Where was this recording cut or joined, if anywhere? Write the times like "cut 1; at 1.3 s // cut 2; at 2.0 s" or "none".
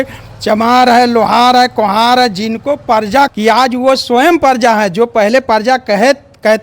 cut 1; at 3.3 s